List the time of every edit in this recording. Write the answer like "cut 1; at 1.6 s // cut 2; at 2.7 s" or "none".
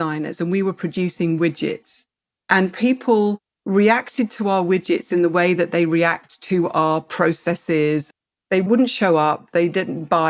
cut 1; at 8.7 s